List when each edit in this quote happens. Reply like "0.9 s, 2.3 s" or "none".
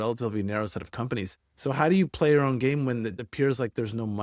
3.2 s

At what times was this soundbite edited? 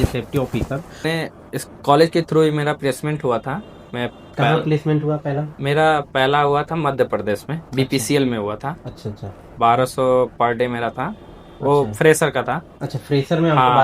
1.0 s

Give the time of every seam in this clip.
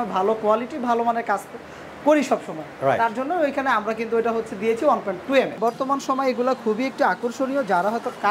5.6 s

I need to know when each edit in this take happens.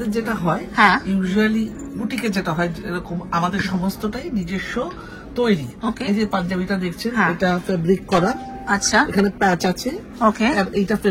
none

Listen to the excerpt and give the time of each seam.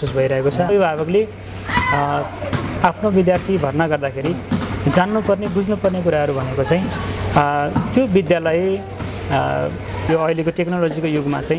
0.7 s, 10.1 s

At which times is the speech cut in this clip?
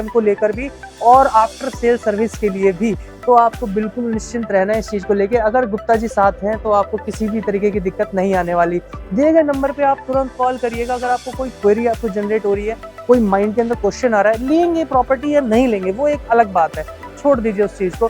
none

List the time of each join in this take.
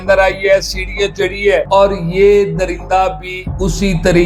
none

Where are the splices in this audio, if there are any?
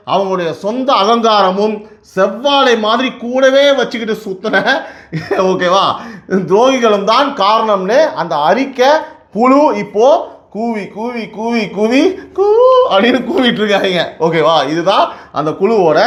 none

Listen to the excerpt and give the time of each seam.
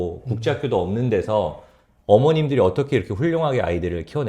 none

